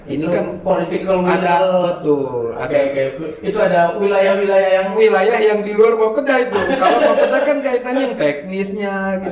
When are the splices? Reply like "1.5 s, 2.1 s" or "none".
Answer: none